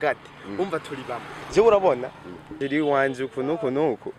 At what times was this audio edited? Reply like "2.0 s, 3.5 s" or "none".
2.5 s